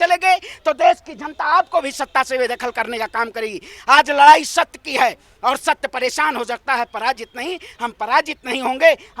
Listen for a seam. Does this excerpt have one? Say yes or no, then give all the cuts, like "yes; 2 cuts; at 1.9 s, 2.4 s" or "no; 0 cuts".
no; 0 cuts